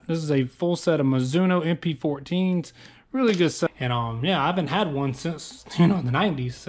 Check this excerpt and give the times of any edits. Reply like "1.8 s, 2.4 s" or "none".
3.7 s